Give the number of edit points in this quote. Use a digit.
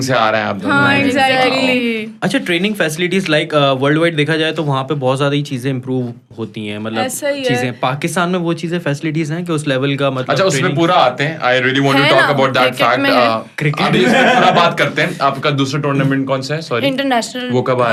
0